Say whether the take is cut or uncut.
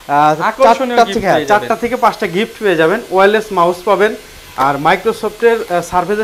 uncut